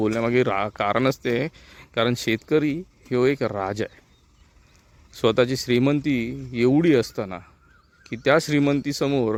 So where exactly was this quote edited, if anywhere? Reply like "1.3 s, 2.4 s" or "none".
none